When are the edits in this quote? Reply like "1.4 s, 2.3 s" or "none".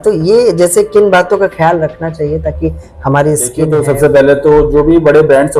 3.7 s